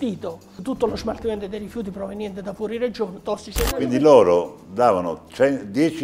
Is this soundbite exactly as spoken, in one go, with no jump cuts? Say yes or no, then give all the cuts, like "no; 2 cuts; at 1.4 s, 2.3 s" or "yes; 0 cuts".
no; 1 cut; at 3.7 s